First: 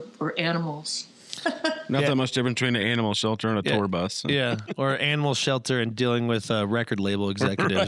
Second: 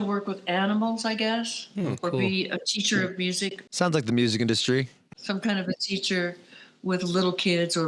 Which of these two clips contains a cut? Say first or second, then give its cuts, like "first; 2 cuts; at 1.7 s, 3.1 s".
second; 2 cuts; at 3.6 s, 5.1 s